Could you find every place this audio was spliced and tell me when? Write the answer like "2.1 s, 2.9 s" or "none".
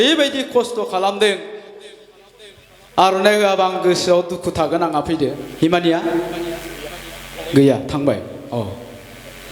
5.5 s